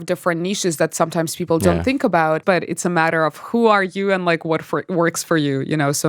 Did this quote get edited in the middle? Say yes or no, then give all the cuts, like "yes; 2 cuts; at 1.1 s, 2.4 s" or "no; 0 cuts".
yes; 1 cut; at 2.4 s